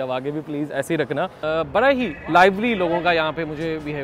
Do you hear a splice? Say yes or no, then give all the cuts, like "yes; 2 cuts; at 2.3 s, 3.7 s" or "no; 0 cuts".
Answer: yes; 1 cut; at 1.3 s